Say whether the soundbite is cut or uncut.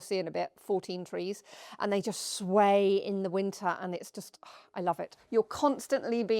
cut